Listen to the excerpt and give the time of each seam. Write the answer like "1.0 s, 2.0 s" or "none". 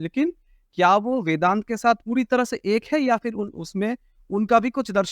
2.0 s